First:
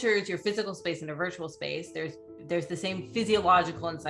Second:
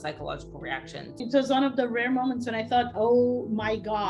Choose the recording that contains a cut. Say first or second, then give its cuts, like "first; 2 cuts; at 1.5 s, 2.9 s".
second; 1 cut; at 1.2 s